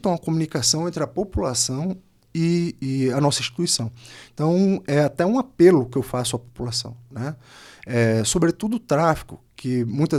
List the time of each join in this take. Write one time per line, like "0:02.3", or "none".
none